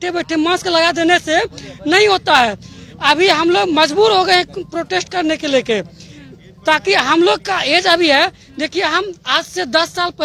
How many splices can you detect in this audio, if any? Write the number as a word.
zero